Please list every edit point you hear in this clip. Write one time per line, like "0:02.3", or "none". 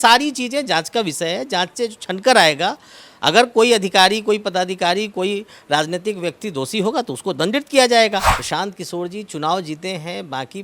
0:08.3